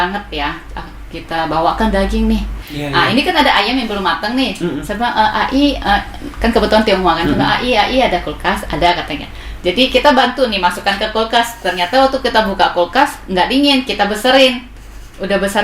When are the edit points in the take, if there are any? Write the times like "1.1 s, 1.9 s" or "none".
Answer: 2.6 s